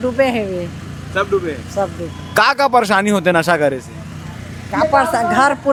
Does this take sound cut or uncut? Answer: uncut